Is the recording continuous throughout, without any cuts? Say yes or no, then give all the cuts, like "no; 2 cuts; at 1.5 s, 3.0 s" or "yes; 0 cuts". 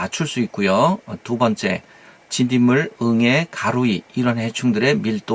yes; 0 cuts